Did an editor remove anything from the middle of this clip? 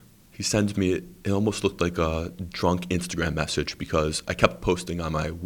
no; 0 cuts

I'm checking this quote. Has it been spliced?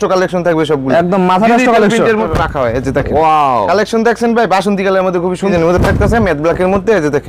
yes; 2 cuts; at 2.3 s, 5.5 s

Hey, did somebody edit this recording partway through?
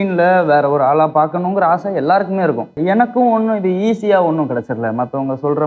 yes; 1 cut; at 2.8 s

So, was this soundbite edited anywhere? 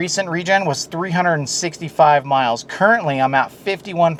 no; 0 cuts

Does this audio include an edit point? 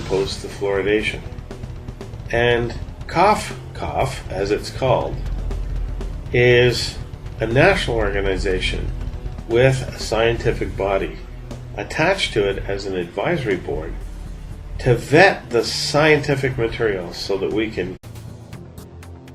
no; 0 cuts

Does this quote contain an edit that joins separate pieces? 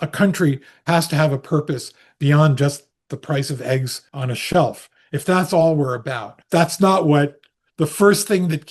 yes; 2 cuts; at 4.0 s, 6.3 s

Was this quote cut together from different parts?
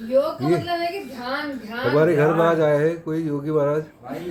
no; 0 cuts

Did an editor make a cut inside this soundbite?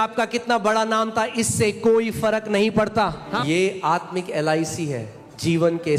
yes; 1 cut; at 3.3 s

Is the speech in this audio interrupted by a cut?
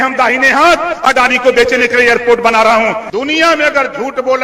yes; 1 cut; at 3.0 s

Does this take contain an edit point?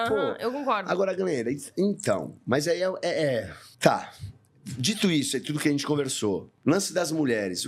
no; 0 cuts

